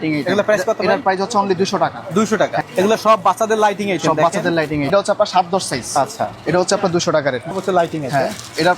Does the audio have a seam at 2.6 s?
yes; 3 cuts; at 2.6 s, 4.9 s, 7.5 s

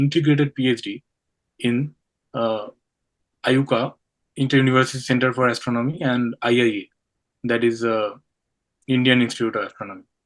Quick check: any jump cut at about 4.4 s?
no; 0 cuts

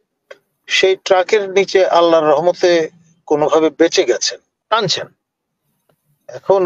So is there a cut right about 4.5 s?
yes; 1 cut; at 4.5 s

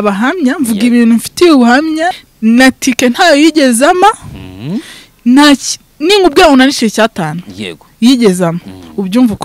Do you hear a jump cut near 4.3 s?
no; 1 cut; at 2.2 s

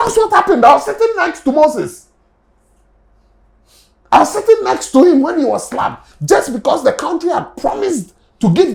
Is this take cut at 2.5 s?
no; 0 cuts

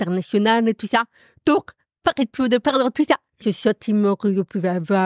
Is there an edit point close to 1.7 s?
no; 1 cut; at 3.4 s

